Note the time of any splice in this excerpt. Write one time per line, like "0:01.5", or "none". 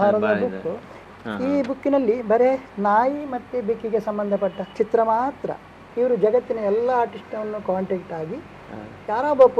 0:01.0
0:04.7
0:05.8